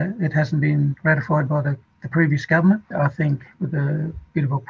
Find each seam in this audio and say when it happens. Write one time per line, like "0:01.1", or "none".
0:01.9
0:02.9